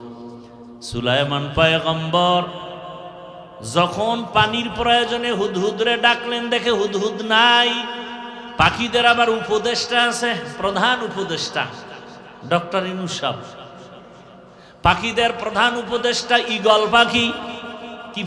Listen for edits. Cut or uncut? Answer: cut